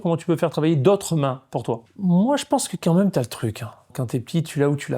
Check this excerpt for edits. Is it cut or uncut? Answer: cut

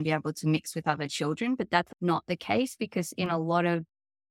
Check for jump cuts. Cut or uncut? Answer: cut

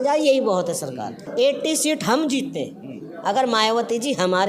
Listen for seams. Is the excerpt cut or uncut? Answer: cut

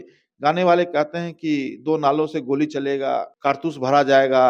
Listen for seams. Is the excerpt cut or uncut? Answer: cut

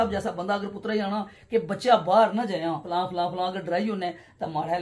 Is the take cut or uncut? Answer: cut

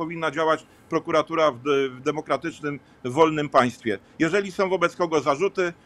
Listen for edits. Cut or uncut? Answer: uncut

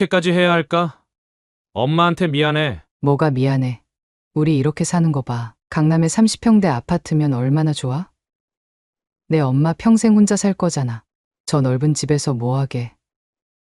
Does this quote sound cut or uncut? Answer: uncut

